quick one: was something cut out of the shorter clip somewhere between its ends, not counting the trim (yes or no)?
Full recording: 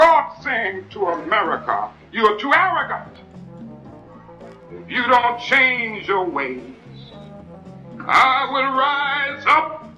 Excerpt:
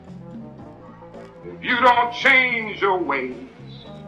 no